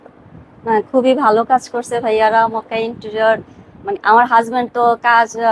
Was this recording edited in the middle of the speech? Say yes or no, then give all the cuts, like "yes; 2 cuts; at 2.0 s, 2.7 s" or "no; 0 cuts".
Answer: no; 0 cuts